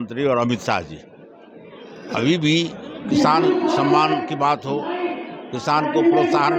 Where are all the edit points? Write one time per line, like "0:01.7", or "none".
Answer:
none